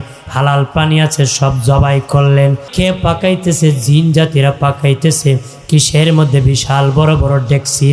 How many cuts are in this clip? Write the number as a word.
one